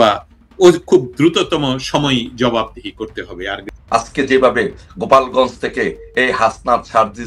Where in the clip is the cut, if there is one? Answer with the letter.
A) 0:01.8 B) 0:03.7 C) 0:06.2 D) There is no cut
B